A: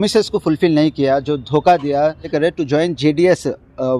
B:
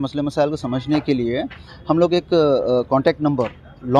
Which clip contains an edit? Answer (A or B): A